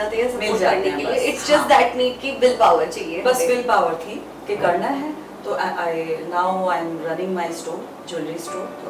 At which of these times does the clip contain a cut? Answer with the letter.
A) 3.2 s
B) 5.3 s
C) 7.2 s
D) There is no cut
D